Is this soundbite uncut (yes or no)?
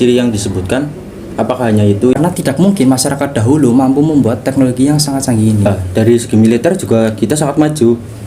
no